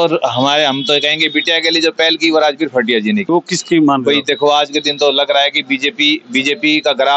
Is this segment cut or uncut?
cut